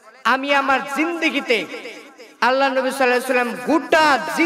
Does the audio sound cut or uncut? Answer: uncut